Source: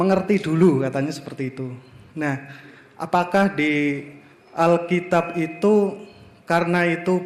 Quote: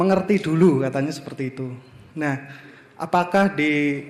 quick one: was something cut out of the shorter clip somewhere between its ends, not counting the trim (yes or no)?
no